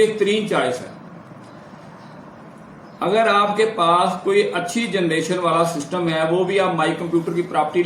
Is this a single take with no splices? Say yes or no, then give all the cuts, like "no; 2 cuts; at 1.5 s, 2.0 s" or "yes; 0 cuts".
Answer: yes; 0 cuts